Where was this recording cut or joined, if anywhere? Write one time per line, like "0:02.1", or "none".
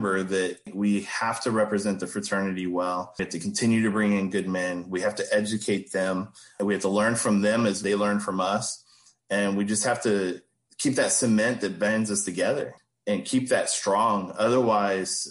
none